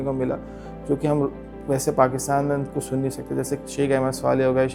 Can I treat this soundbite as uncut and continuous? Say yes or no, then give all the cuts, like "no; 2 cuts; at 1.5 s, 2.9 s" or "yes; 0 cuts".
yes; 0 cuts